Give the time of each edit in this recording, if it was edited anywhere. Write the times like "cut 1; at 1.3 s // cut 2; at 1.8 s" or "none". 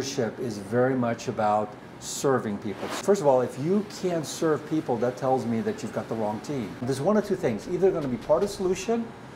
cut 1; at 3.0 s // cut 2; at 6.8 s